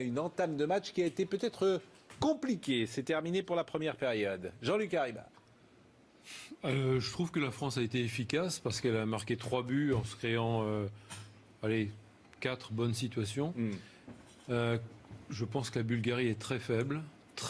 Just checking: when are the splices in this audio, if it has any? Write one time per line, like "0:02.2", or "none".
0:15.2